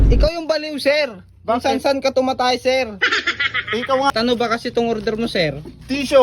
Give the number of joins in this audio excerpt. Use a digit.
1